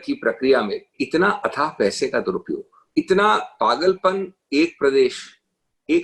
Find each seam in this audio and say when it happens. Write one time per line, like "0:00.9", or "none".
0:01.0
0:02.7